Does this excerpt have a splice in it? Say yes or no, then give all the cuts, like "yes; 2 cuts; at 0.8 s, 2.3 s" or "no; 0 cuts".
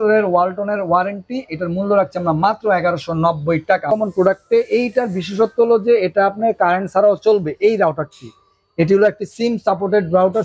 yes; 1 cut; at 3.9 s